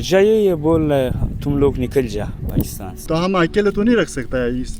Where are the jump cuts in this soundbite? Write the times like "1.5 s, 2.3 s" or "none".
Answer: 3.1 s